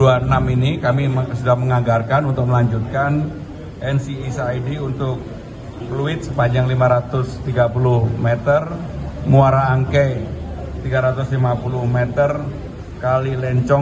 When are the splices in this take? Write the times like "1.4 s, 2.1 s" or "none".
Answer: none